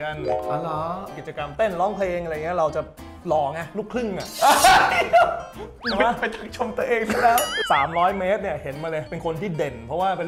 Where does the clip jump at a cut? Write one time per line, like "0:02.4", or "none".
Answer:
0:01.1
0:07.6